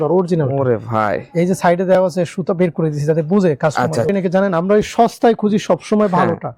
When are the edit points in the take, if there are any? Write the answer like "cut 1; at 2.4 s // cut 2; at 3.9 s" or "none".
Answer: cut 1; at 4.1 s